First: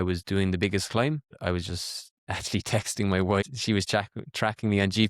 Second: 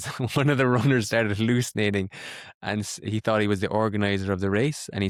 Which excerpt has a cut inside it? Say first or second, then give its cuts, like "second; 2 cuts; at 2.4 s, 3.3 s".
first; 2 cuts; at 1.3 s, 3.4 s